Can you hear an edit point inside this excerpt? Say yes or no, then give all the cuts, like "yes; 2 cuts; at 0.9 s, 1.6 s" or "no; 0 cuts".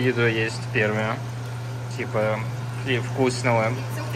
no; 0 cuts